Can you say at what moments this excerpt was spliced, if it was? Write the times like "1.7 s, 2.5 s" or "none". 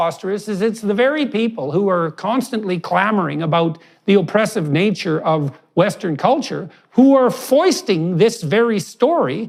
none